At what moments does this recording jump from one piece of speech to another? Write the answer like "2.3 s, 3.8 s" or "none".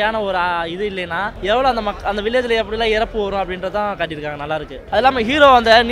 1.3 s, 4.8 s